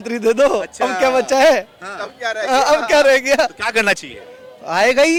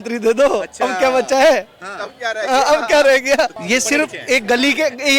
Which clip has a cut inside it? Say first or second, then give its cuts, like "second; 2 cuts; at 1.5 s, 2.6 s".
second; 1 cut; at 3.6 s